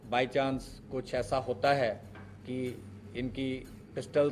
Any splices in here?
no; 0 cuts

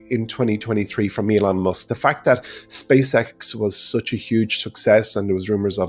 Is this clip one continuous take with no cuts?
yes; 0 cuts

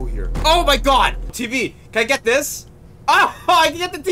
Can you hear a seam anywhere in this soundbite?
yes; 1 cut; at 1.4 s

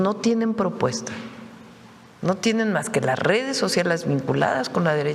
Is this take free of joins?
yes; 0 cuts

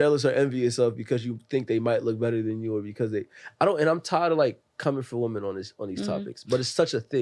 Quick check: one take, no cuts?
yes; 0 cuts

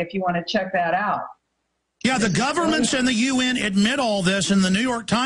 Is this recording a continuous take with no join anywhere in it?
yes; 0 cuts

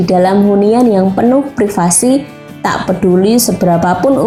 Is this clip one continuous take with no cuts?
yes; 0 cuts

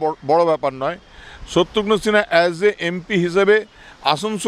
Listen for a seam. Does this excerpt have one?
no; 0 cuts

